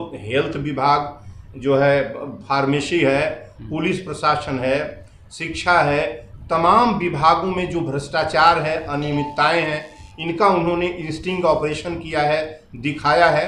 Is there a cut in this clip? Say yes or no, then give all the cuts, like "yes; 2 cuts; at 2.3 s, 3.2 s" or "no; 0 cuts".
no; 0 cuts